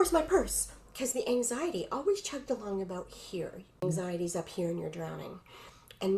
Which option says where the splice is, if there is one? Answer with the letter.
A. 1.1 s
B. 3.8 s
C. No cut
B